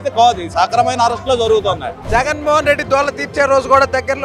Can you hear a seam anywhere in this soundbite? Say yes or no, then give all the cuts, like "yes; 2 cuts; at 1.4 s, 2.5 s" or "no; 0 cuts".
yes; 1 cut; at 1.9 s